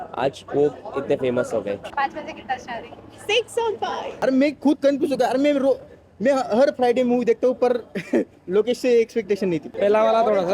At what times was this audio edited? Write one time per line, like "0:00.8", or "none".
0:01.9
0:04.0
0:09.7

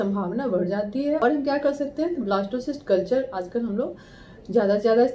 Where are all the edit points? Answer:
0:01.2

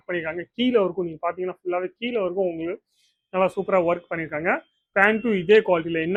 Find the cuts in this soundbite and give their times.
none

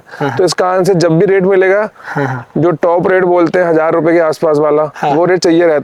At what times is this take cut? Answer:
none

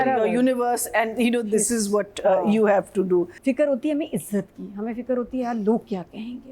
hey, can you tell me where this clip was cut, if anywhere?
0:03.3

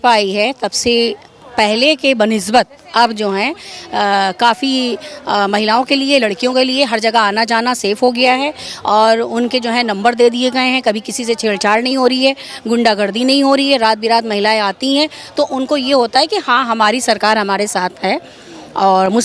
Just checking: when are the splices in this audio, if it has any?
none

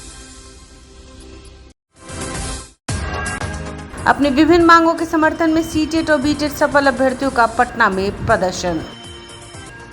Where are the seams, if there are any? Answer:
0:01.1

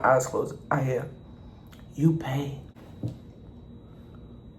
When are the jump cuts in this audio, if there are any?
0:02.6

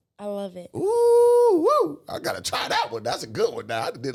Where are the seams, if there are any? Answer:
none

